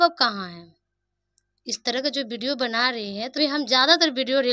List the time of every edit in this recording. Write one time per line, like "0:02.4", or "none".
0:03.4